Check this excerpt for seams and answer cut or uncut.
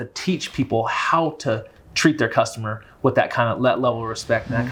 uncut